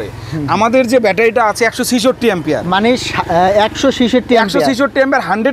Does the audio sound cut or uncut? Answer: uncut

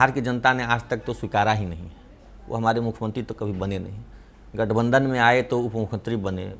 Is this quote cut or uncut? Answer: uncut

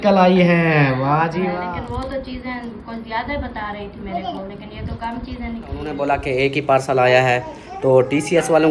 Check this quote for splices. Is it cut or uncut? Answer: cut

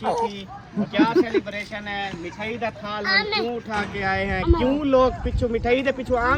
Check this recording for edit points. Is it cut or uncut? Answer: uncut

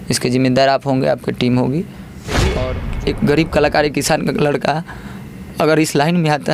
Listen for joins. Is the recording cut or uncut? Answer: cut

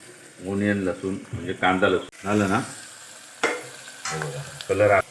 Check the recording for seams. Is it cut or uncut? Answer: cut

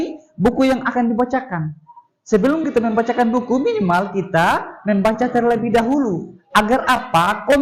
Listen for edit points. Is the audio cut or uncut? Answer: uncut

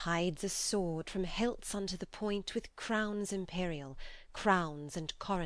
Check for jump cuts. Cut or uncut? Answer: cut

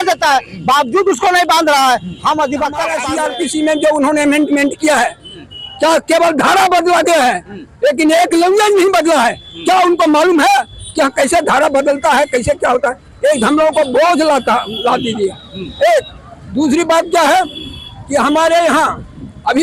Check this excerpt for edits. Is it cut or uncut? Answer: cut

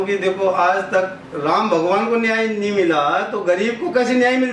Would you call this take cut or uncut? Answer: uncut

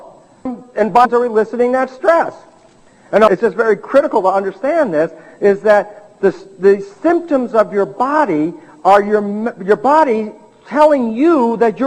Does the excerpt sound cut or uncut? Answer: uncut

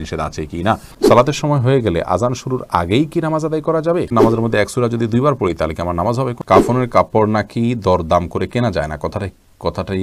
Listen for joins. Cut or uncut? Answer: cut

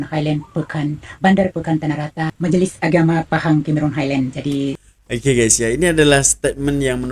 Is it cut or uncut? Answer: cut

